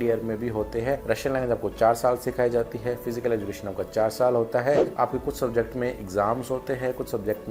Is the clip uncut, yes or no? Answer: no